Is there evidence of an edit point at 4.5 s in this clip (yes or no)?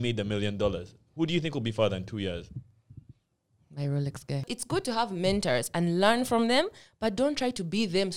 yes